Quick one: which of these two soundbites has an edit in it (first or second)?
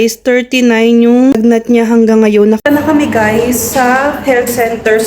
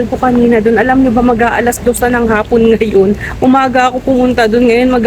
first